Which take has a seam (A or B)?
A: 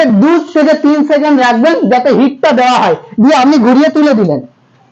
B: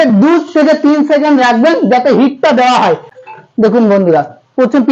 B